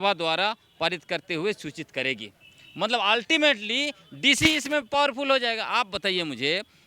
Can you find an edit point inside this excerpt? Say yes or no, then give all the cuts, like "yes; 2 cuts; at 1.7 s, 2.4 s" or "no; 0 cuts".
no; 0 cuts